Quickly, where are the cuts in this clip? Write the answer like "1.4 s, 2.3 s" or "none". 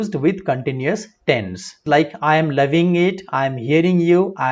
1.8 s